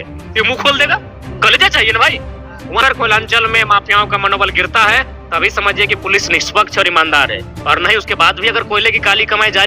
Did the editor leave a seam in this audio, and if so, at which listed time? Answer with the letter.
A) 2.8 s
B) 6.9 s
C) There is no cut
A